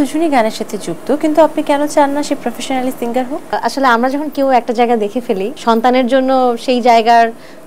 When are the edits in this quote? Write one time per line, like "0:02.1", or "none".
0:03.6
0:05.5